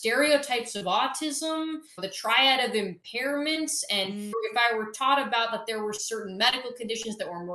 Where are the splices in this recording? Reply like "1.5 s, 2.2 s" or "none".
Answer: 1.9 s, 4.3 s

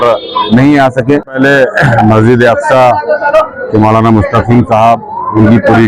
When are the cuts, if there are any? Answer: 1.4 s

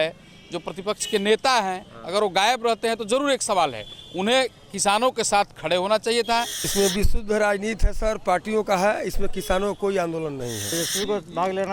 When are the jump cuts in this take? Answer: 6.6 s, 10.7 s

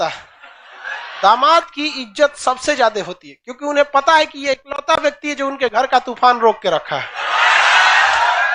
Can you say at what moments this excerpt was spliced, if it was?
1.1 s

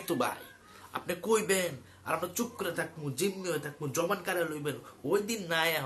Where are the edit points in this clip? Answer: none

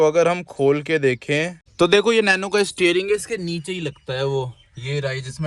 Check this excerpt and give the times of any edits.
1.6 s

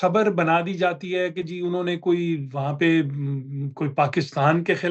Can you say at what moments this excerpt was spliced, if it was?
none

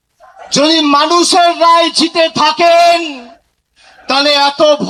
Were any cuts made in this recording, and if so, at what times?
none

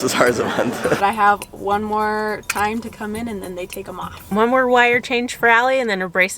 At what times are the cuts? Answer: 0.9 s, 4.1 s

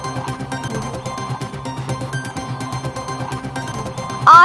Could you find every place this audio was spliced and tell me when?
0.9 s

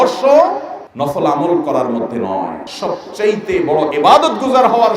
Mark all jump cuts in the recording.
2.6 s

